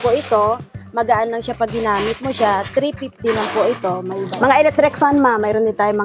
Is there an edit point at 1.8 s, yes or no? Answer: no